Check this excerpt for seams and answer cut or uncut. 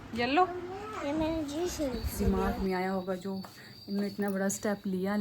cut